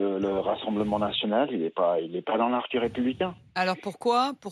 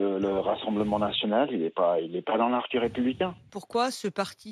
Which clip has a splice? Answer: second; 1 cut; at 3.5 s

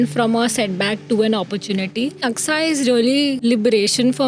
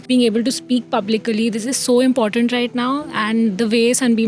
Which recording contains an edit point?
first; 2 cuts; at 2.2 s, 3.4 s

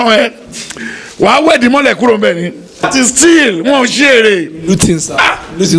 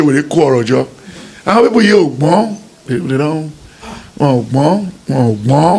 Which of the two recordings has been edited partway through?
first; 1 cut; at 2.8 s

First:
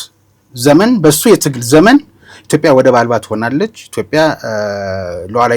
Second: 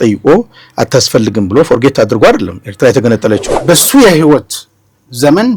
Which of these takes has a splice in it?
second; 1 cut; at 3.5 s

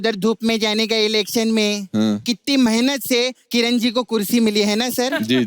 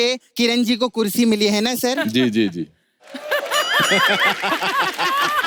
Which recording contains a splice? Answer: first; 1 cut; at 2.2 s

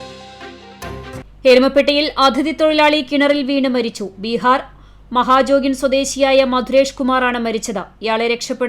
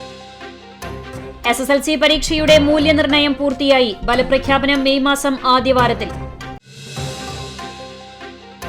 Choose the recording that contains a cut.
first; 1 cut; at 1.1 s

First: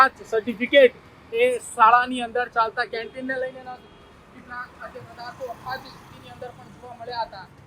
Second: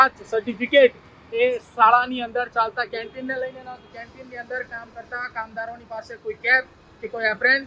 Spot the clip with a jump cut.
second; 1 cut; at 3.9 s

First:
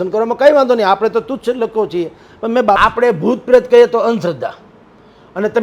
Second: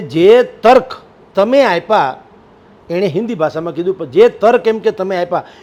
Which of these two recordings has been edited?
first; 1 cut; at 2.8 s

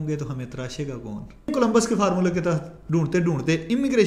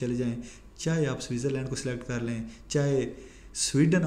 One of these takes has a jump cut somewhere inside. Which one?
first; 1 cut; at 1.5 s

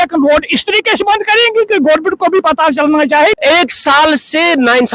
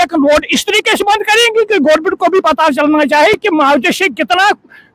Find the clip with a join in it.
first; 1 cut; at 3.4 s

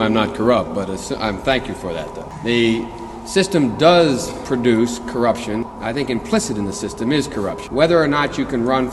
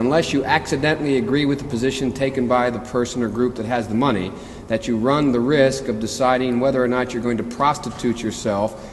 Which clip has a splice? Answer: first; 3 cuts; at 2.2 s, 5.7 s, 7.6 s

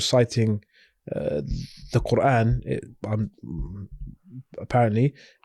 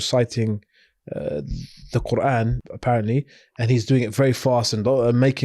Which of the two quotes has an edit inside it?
second; 1 cut; at 2.6 s

